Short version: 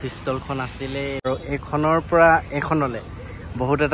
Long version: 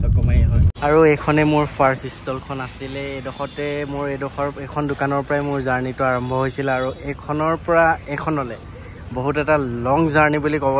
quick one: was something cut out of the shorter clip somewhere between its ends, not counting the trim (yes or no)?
yes